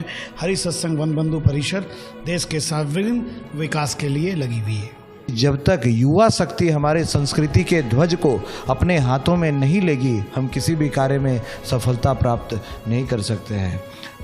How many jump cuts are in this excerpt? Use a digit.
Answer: 1